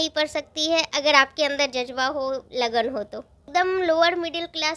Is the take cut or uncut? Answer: cut